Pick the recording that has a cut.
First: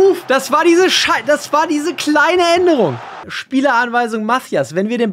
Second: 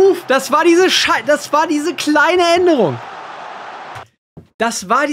first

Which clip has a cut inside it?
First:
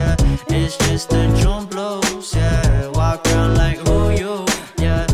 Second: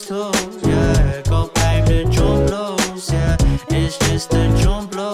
second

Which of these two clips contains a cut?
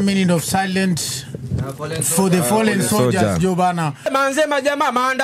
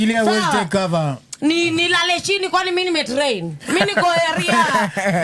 first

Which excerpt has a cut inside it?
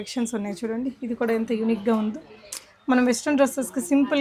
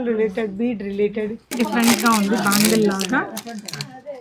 second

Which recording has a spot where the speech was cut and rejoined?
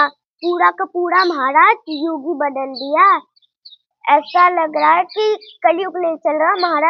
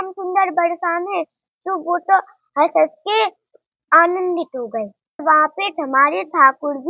second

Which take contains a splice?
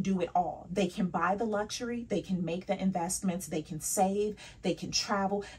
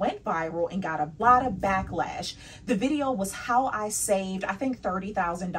second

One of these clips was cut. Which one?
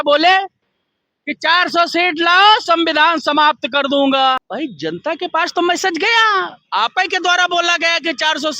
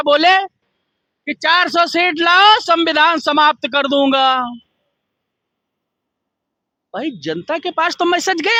first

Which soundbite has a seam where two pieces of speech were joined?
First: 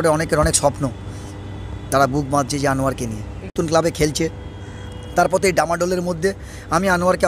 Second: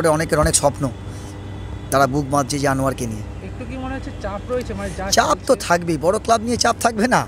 first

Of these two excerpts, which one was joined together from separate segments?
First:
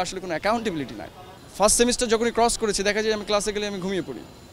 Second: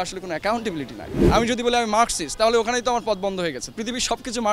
second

